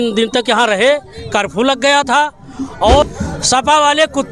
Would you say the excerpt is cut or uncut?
cut